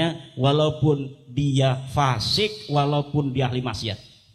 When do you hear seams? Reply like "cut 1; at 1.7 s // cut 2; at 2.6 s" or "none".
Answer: none